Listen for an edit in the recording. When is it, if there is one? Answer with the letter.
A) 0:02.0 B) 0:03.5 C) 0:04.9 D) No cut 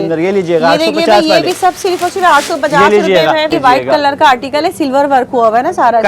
B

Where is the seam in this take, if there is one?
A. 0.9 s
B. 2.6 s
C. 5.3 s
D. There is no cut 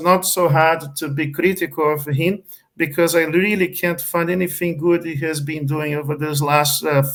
D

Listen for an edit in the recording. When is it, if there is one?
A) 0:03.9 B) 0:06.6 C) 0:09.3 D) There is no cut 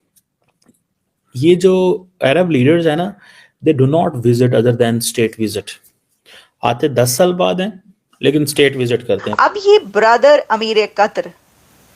C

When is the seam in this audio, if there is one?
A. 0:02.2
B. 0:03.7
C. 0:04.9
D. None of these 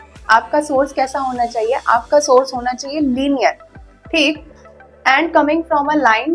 D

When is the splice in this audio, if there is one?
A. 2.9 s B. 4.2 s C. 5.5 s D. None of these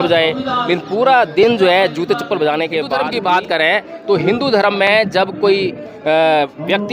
A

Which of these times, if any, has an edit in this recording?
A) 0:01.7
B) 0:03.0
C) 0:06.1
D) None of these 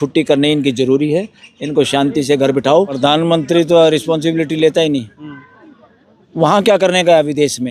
B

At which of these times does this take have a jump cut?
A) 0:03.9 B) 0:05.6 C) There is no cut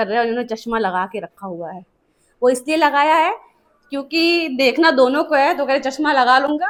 C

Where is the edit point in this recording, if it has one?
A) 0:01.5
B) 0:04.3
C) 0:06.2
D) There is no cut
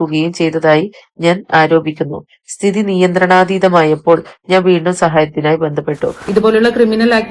C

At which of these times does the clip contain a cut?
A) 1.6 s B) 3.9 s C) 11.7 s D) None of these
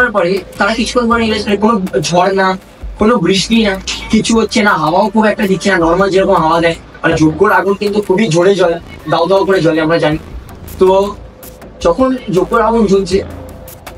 A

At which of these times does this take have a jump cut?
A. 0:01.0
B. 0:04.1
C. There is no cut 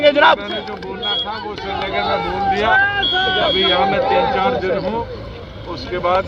C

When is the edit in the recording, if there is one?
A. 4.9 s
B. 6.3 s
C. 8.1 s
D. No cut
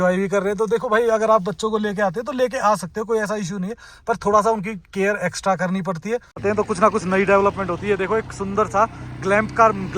B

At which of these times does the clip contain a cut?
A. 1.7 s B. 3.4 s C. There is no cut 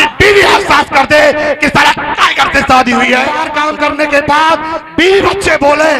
B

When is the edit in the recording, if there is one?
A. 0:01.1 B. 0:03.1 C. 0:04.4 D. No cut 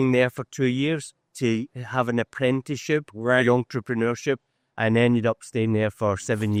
D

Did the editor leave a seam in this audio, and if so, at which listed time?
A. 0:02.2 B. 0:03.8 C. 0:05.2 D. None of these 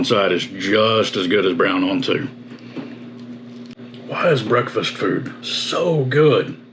B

